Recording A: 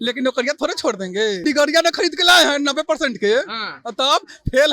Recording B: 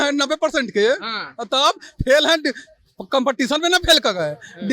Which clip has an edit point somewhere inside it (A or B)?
A